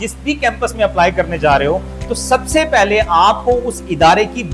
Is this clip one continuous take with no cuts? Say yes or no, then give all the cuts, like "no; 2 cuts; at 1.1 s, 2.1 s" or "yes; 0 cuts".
yes; 0 cuts